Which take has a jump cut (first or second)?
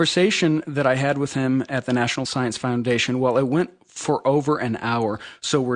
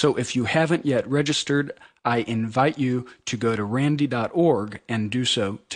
second